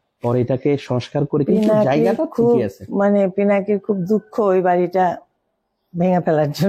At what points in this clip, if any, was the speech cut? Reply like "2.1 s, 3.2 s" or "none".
none

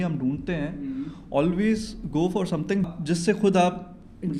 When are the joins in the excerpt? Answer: 2.9 s

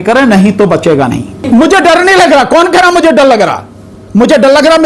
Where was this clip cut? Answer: 1.4 s

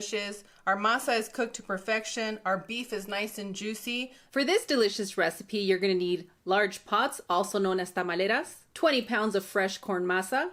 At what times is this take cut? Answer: none

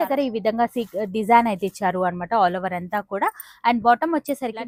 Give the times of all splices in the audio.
none

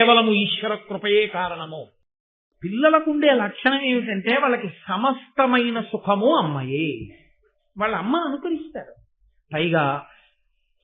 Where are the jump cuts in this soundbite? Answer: 2.3 s

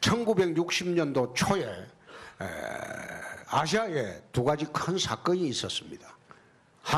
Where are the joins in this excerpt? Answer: none

